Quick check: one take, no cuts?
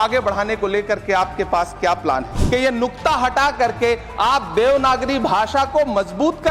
no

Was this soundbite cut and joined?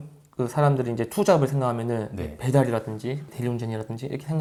no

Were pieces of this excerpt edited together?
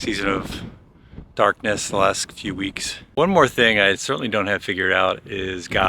yes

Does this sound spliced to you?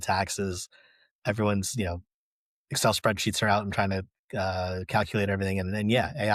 no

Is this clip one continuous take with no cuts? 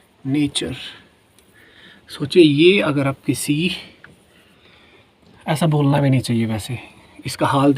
yes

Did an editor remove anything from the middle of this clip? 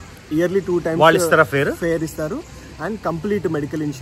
no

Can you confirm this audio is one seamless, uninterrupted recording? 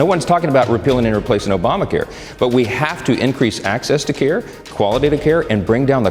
yes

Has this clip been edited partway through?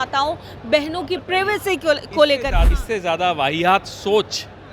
yes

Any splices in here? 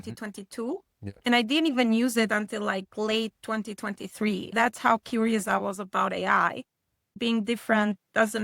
yes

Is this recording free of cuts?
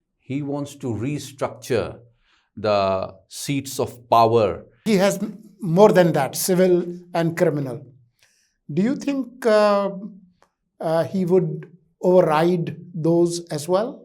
no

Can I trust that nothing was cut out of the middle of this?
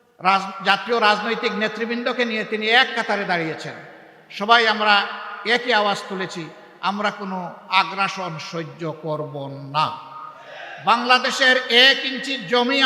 no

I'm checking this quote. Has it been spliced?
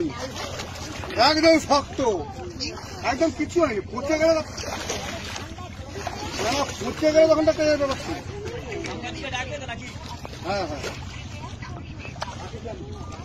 no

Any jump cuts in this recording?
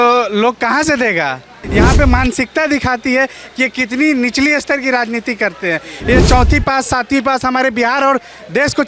yes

